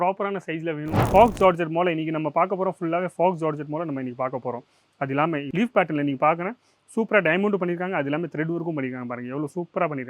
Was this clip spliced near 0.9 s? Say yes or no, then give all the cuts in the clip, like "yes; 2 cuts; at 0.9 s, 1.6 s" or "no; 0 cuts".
yes; 1 cut; at 0.9 s